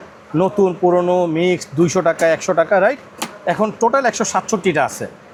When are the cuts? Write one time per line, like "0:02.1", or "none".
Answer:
none